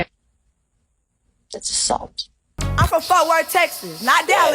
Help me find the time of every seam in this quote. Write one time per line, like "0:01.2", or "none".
0:02.6